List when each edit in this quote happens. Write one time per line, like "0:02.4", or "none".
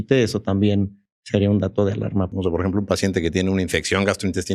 0:02.3